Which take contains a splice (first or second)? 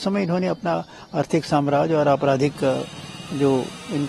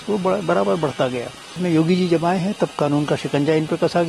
second